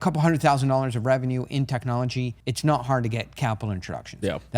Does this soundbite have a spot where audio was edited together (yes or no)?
yes